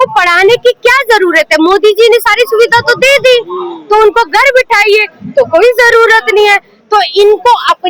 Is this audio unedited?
yes; 0 cuts

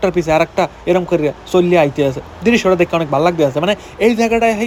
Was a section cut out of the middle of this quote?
no; 0 cuts

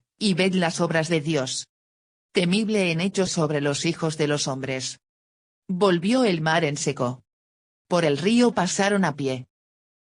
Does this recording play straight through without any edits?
no; 1 cut; at 1.0 s

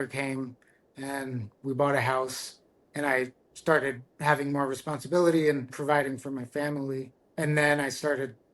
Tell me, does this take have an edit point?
yes; 2 cuts; at 5.7 s, 7.2 s

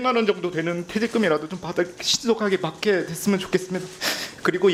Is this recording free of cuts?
yes; 0 cuts

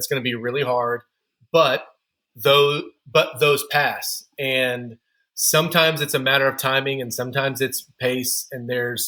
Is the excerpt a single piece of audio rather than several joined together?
yes; 0 cuts

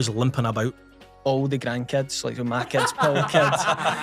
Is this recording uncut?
no; 1 cut; at 1.1 s

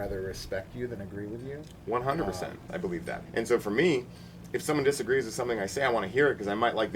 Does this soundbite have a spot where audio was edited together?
yes; 1 cut; at 2.8 s

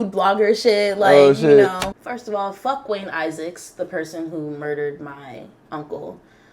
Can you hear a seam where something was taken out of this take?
yes; 1 cut; at 1.8 s

